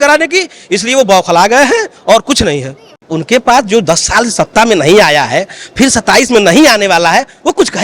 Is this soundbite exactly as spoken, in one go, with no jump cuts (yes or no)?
yes